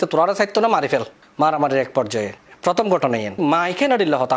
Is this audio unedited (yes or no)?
no